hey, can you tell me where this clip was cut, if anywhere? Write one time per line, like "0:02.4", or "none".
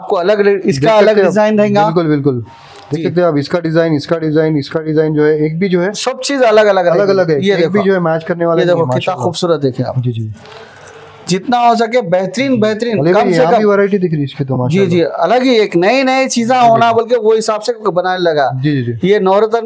none